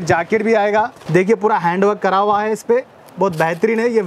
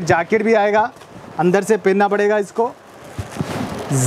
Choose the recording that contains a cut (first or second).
first